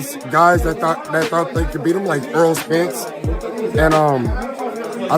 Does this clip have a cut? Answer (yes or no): no